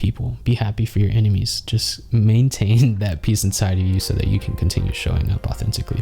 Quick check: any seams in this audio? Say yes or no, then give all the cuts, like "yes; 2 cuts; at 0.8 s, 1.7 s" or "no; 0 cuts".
no; 0 cuts